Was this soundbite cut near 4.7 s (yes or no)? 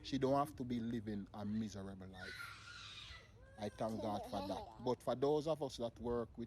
yes